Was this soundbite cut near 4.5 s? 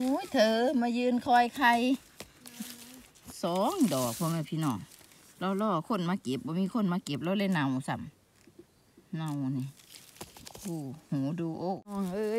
no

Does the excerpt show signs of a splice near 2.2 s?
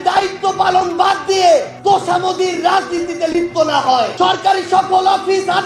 no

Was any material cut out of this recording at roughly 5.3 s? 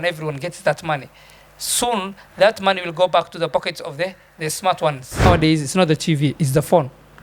yes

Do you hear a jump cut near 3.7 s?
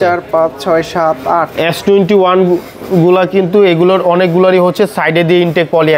no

